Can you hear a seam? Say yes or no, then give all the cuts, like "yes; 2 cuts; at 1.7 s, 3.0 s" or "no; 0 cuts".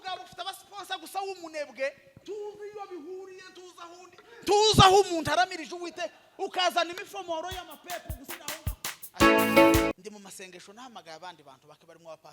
yes; 1 cut; at 9.9 s